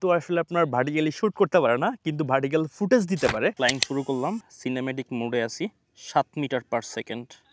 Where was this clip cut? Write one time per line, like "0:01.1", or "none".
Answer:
0:03.5